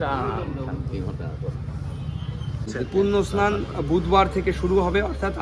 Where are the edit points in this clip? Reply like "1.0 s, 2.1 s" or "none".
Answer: 2.7 s

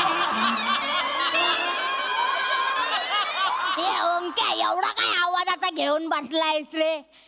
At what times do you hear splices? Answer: 3.7 s

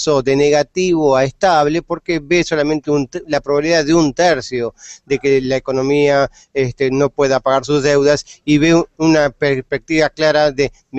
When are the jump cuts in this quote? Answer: none

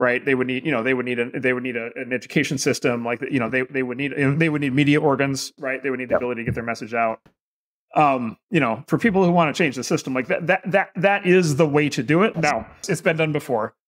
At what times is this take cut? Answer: 12.8 s

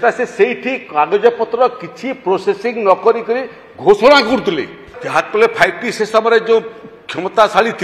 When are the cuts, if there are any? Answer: 5.0 s

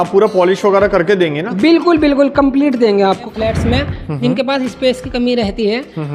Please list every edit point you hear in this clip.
3.3 s

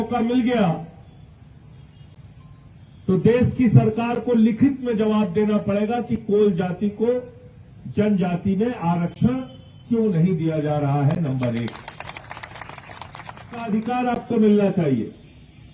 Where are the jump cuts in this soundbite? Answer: 13.8 s

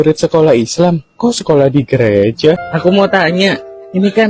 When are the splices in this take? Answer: 2.6 s

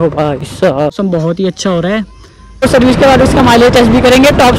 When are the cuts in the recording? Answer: 0.9 s, 2.6 s

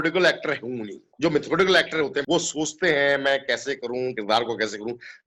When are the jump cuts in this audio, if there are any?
none

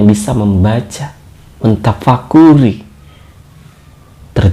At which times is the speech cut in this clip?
none

